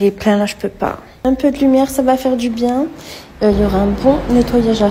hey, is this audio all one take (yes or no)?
no